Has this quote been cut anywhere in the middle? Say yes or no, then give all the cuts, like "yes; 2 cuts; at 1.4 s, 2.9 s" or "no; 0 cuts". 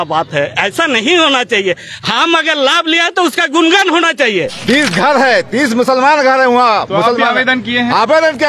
yes; 1 cut; at 4.6 s